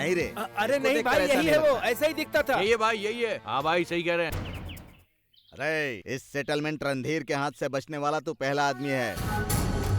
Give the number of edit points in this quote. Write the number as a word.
one